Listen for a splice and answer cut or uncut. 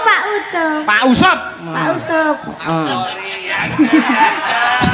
uncut